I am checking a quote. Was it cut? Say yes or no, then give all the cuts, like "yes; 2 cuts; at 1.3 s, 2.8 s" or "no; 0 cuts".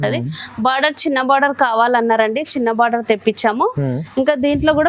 no; 0 cuts